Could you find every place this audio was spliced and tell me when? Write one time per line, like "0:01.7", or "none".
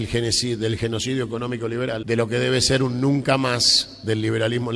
0:02.0